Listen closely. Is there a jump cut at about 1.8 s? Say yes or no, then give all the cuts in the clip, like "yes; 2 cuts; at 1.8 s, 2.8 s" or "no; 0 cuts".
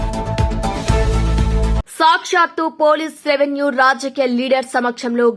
yes; 1 cut; at 1.8 s